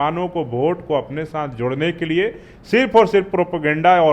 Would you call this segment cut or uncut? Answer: uncut